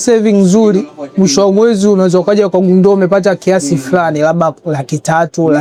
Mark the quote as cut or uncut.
uncut